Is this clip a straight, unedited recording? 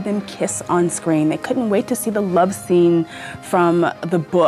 yes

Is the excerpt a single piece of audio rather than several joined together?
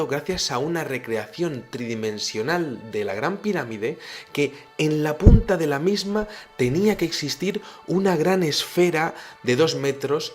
no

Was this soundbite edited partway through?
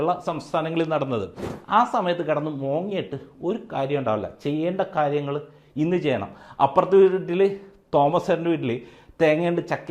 yes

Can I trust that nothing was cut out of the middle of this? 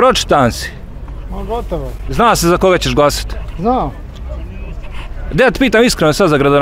yes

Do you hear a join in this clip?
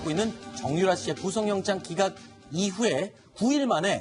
no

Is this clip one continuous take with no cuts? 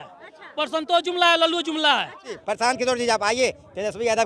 no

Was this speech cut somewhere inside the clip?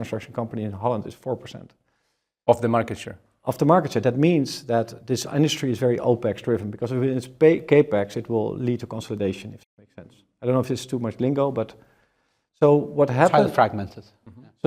no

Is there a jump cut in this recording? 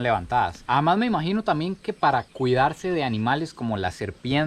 no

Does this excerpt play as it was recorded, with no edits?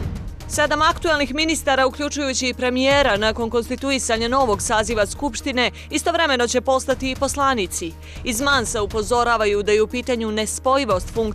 yes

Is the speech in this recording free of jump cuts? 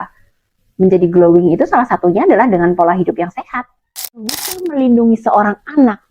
no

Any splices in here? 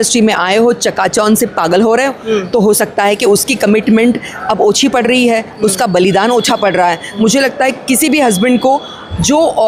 no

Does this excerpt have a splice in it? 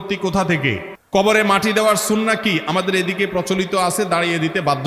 yes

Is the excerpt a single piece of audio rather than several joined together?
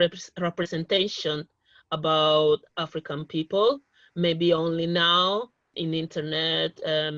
no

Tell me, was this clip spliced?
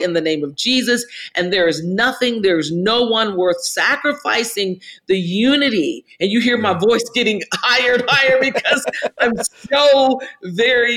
no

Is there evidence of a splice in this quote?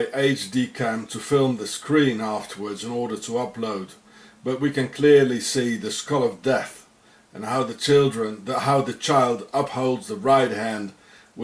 no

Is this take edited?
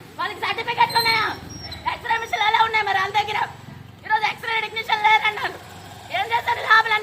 no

